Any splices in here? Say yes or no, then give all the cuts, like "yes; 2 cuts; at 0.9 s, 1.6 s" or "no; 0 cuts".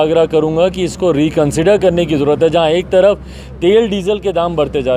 no; 0 cuts